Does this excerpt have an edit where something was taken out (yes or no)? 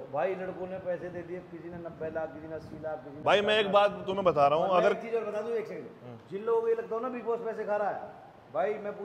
no